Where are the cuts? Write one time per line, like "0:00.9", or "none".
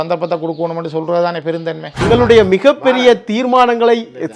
0:02.0